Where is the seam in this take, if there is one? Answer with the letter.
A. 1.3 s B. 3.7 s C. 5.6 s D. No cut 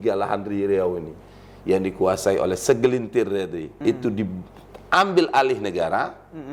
B